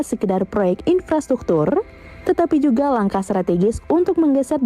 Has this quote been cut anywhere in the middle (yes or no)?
no